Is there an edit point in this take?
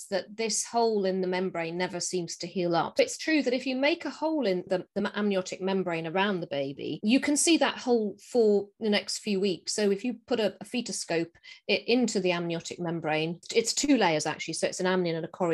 yes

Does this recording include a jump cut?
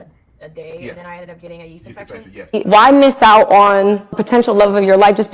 yes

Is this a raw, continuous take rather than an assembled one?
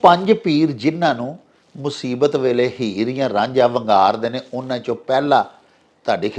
yes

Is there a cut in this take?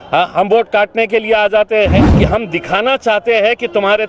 yes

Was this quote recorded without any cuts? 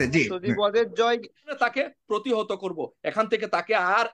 no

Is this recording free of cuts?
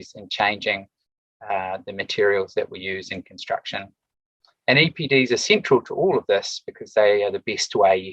yes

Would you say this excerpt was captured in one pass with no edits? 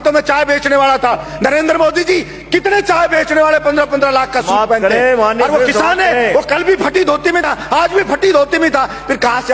no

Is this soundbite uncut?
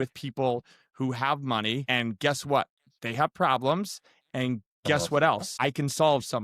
no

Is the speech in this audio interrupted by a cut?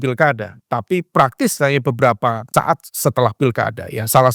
yes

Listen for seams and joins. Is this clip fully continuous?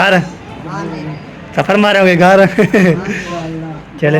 yes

